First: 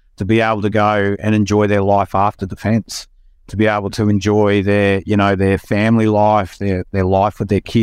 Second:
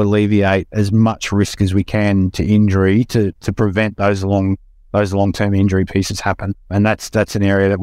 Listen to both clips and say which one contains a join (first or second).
second